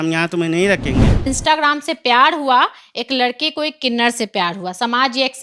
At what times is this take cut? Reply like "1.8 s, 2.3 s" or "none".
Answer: 1.2 s